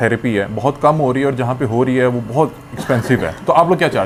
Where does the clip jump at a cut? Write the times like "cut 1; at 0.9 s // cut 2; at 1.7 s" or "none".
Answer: none